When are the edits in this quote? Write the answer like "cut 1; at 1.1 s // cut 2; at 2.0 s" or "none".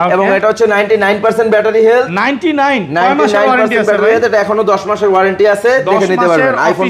none